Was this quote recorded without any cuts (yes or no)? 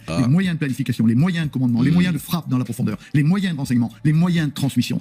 yes